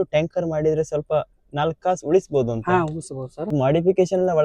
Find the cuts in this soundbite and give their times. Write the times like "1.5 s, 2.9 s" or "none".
3.5 s